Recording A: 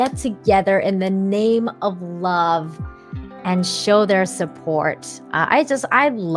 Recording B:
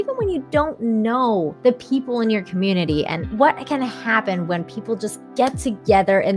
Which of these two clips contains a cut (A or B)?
B